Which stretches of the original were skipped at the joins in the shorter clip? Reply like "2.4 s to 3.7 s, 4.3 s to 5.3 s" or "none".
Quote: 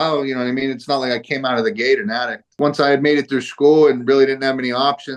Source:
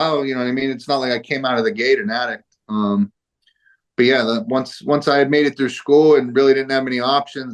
2.5 s to 4.7 s